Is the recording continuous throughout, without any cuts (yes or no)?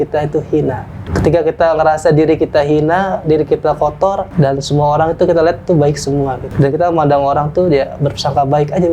no